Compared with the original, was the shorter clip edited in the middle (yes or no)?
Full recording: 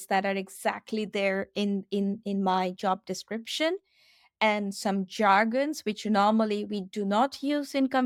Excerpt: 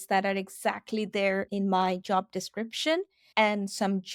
yes